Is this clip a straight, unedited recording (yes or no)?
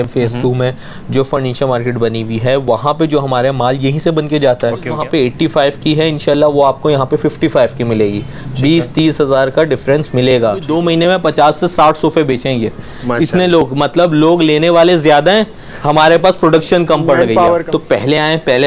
no